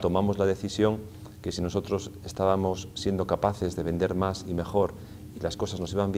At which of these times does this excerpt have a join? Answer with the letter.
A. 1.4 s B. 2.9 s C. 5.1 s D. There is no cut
D